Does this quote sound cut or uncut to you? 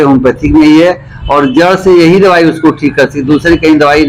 uncut